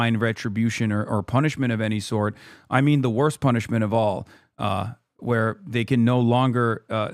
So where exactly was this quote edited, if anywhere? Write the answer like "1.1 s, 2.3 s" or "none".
none